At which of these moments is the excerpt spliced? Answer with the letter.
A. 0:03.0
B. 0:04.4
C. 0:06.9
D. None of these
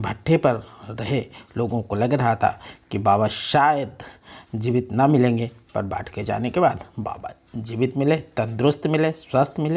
D